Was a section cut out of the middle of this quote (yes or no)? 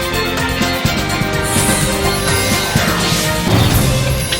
no